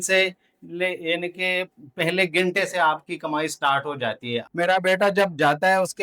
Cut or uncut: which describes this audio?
cut